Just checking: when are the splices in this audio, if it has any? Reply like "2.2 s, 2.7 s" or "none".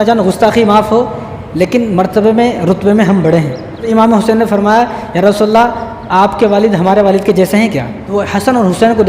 3.8 s, 8.0 s